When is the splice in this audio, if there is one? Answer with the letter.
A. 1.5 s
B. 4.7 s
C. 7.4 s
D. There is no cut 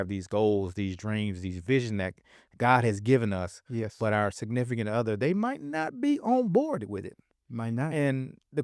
D